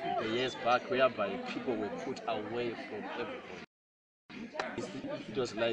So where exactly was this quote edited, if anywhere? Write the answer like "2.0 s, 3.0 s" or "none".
none